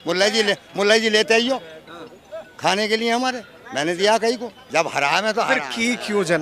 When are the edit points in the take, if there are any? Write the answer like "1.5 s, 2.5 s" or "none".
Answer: 4.6 s